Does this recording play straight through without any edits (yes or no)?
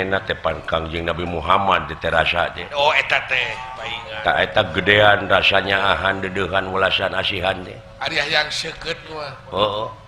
yes